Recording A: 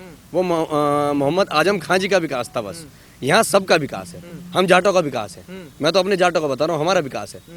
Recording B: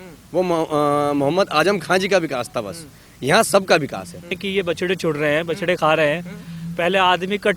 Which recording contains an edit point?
B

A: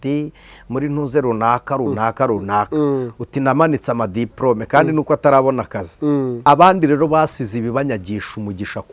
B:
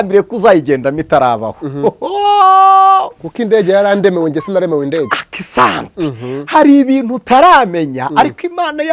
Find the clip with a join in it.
A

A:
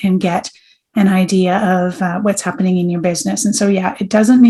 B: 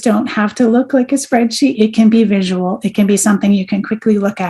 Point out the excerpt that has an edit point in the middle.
B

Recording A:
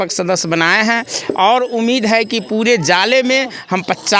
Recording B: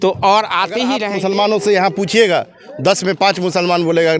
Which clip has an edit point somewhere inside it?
B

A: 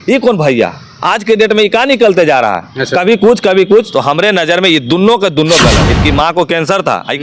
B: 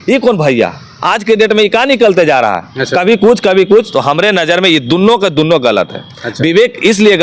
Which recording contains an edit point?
A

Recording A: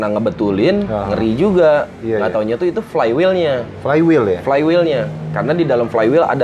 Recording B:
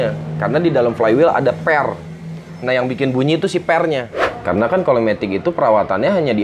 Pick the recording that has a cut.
B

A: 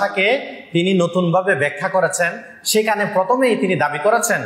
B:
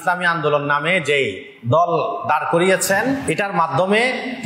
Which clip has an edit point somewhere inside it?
B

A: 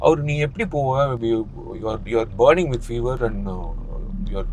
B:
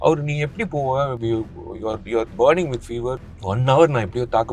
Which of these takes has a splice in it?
B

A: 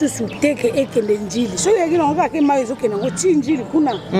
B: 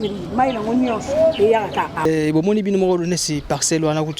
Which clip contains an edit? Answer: B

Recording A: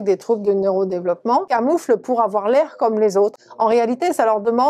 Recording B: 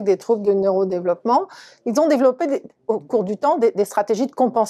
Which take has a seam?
A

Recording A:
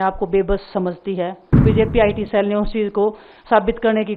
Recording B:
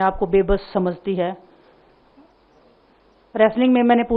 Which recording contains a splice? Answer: A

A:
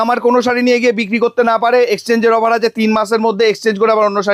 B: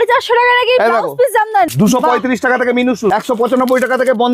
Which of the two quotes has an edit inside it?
B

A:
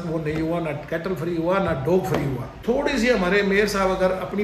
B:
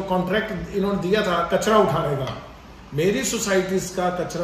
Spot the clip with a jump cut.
A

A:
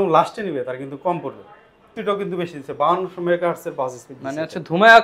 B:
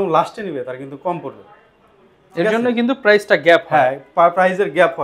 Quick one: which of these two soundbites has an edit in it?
A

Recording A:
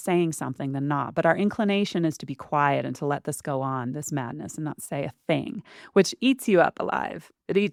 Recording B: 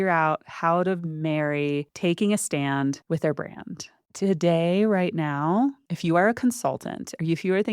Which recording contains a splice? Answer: B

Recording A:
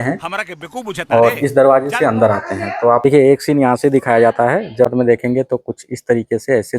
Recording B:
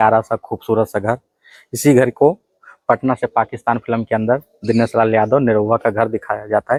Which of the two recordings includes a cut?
A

